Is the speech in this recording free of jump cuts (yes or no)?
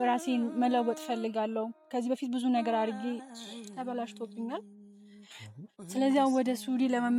yes